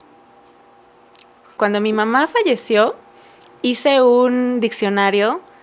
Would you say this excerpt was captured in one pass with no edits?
no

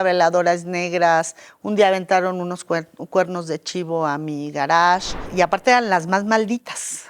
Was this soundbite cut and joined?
yes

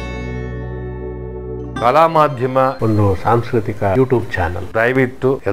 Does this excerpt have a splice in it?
no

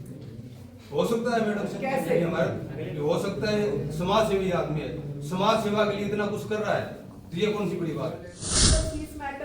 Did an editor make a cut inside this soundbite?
yes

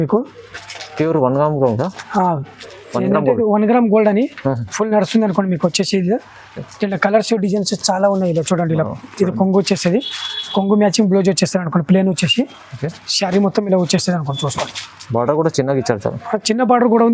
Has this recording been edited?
no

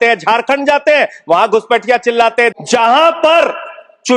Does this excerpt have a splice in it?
yes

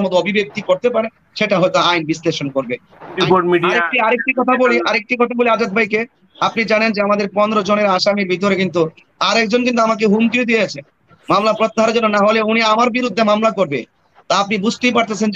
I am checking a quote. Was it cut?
yes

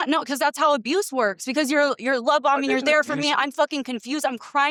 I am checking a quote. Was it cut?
no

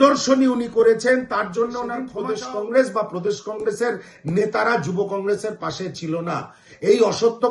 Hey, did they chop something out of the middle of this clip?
yes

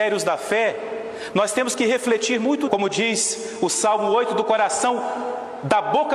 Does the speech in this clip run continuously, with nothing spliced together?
yes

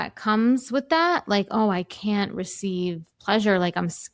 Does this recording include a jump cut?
no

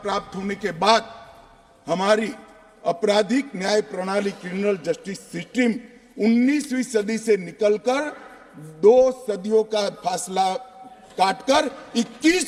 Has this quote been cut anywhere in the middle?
no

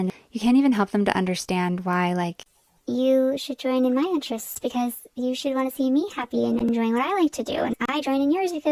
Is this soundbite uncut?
yes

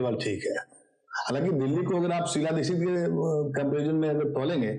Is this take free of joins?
yes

